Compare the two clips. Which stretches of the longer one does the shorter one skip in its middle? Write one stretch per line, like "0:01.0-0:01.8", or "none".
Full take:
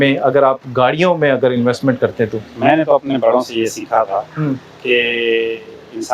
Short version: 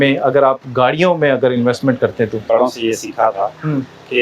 0:02.5-0:03.2